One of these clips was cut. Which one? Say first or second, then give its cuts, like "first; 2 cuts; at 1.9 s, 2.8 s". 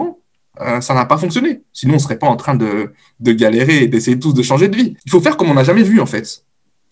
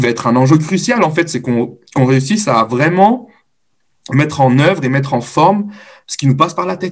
first; 1 cut; at 5.0 s